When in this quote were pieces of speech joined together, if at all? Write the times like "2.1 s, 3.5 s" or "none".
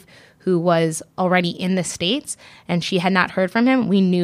none